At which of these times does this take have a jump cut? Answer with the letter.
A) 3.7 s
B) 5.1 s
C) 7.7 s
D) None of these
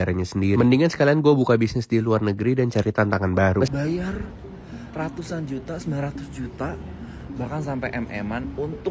A